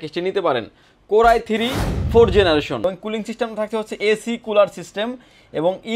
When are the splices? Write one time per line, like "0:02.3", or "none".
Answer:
0:02.8